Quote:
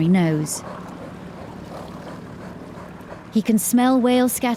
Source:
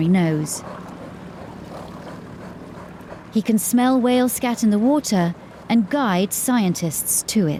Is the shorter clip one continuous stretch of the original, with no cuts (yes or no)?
yes